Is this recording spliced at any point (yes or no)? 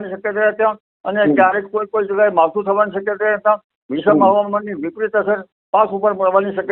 no